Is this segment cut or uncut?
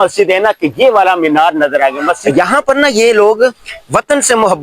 cut